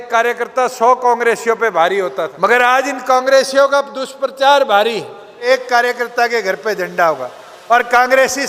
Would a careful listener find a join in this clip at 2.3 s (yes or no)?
yes